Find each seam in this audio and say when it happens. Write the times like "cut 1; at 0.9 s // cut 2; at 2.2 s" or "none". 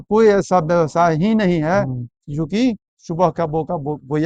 none